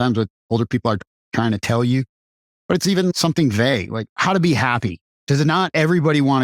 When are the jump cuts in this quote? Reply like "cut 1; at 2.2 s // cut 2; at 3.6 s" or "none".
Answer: cut 1; at 5.0 s